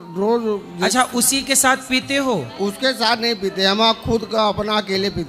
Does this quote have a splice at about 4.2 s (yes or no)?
no